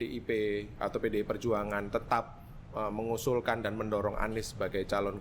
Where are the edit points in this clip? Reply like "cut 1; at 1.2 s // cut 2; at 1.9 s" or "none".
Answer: none